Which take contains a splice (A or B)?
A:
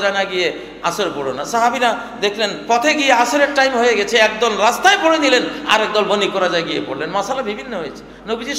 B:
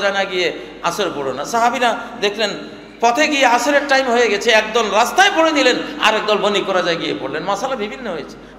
A